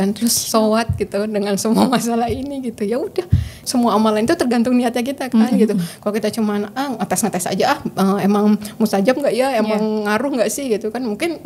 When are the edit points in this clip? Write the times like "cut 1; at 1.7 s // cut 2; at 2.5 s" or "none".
cut 1; at 3.5 s